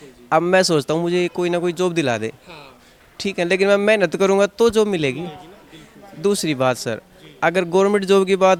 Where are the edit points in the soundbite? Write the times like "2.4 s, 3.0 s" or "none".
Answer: none